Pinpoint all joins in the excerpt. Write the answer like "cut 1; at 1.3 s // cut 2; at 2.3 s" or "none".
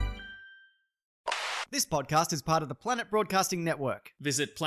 cut 1; at 1.3 s